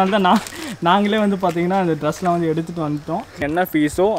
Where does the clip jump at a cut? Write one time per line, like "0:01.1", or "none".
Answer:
0:03.2